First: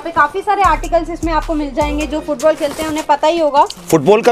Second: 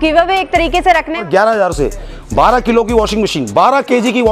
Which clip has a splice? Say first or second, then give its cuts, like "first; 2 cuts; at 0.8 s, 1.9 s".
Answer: second; 1 cut; at 1.2 s